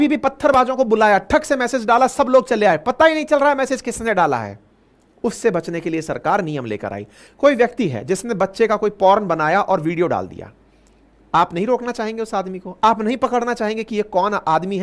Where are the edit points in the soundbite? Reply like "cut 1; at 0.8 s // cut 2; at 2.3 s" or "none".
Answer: cut 1; at 7.2 s